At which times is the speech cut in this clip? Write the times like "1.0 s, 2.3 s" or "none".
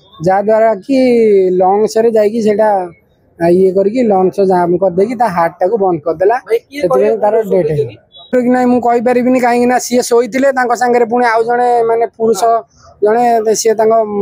8.3 s